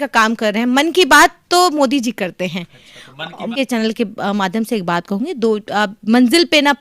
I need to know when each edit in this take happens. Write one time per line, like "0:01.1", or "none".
0:03.5